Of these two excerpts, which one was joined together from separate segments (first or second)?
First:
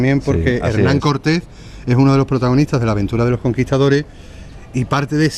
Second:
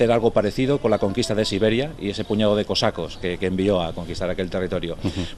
first